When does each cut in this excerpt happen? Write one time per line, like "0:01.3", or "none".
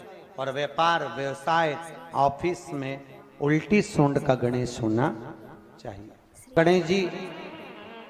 0:06.5